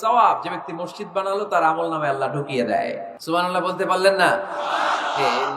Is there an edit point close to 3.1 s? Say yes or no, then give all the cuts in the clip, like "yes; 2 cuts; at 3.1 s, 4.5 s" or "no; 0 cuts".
yes; 1 cut; at 3.1 s